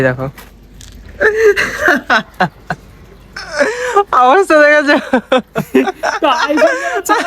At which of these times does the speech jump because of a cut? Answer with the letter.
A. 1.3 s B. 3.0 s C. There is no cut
A